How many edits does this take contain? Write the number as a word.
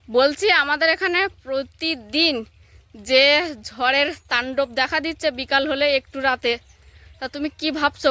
zero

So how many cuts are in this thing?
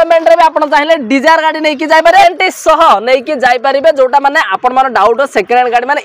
one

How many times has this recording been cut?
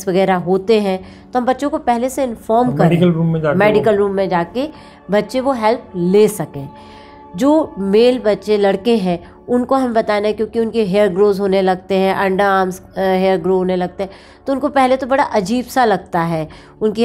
zero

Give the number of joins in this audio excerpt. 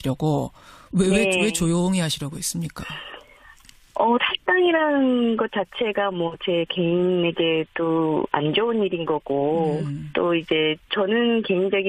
zero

